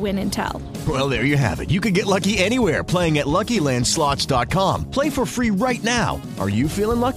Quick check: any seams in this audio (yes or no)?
no